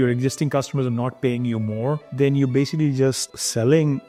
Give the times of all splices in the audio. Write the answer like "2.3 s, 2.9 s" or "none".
none